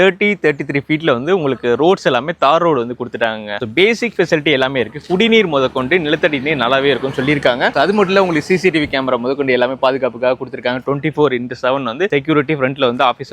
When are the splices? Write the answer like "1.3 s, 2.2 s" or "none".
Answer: none